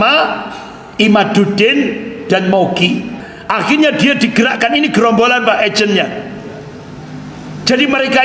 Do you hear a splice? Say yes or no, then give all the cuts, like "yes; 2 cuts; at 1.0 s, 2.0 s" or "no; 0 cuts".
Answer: yes; 1 cut; at 3.2 s